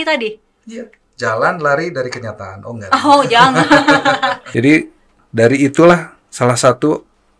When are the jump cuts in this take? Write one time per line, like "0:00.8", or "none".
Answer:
0:04.4